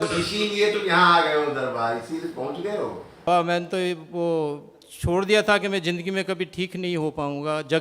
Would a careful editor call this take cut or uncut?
cut